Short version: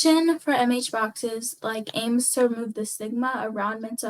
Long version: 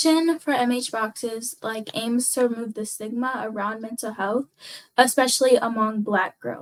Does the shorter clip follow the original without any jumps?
yes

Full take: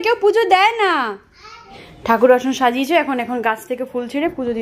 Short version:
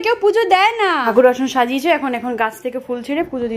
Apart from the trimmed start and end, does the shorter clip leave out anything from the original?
yes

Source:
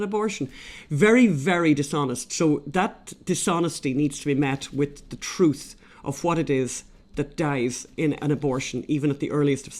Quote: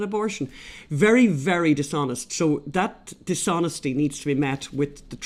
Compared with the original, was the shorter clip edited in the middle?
no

